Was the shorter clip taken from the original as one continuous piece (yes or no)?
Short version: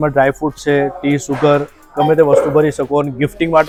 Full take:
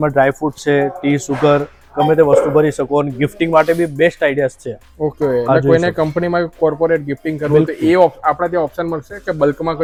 yes